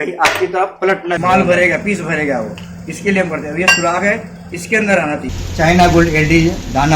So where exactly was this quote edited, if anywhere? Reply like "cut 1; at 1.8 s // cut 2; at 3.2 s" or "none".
cut 1; at 1.2 s // cut 2; at 5.3 s